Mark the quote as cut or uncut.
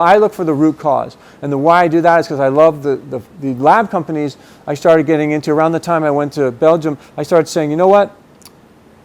uncut